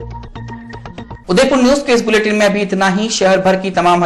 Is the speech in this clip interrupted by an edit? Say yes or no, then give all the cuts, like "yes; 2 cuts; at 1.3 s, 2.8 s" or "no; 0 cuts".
no; 0 cuts